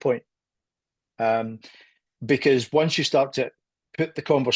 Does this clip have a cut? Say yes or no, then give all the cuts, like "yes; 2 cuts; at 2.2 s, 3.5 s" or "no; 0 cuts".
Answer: no; 0 cuts